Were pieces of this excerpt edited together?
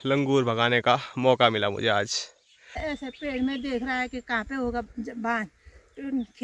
yes; 1 cut; at 2.8 s

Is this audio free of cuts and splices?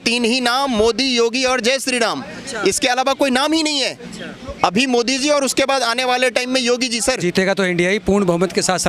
no; 1 cut; at 7.2 s

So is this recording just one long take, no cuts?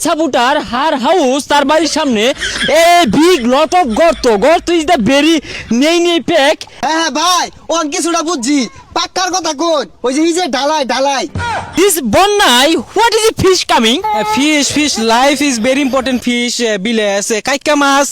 no; 2 cuts; at 6.7 s, 11.7 s

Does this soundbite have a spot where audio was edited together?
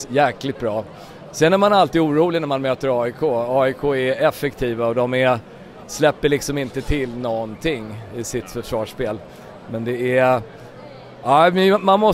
no; 0 cuts

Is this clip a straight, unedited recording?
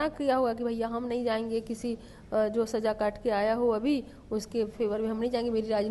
yes; 0 cuts

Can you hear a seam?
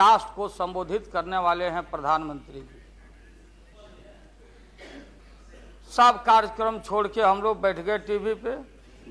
yes; 1 cut; at 5.2 s

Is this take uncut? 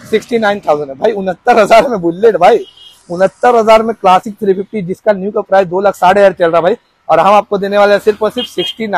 yes; 0 cuts

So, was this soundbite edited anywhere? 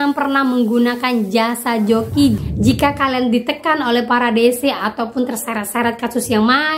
no; 0 cuts

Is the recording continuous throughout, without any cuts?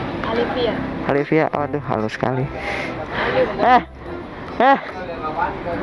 yes; 0 cuts

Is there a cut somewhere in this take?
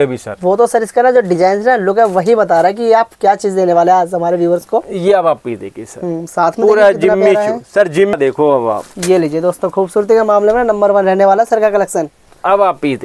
yes; 1 cut; at 8.2 s

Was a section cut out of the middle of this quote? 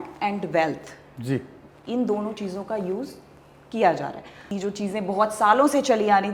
yes; 1 cut; at 4.5 s

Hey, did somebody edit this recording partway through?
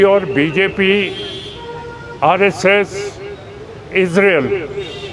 no; 0 cuts

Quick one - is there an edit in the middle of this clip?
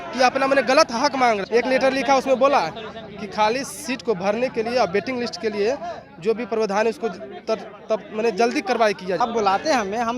yes; 2 cuts; at 1.4 s, 9.2 s

